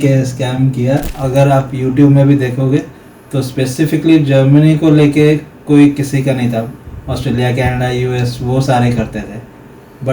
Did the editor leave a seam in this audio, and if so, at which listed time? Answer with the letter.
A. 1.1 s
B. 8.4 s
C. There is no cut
A